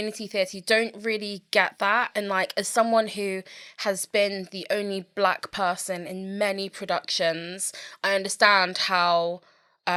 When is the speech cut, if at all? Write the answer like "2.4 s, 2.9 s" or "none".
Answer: none